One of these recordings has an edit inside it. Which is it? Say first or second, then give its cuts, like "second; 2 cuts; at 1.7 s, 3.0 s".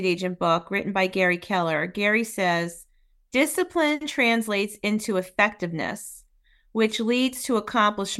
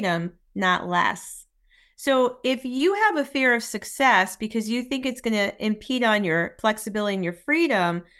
second; 1 cut; at 6.5 s